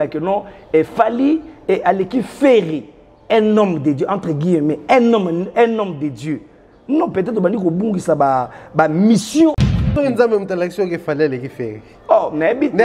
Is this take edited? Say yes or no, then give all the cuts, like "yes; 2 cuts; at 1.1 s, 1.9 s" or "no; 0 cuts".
yes; 1 cut; at 9.6 s